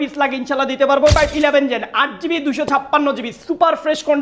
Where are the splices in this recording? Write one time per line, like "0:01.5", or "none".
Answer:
0:01.2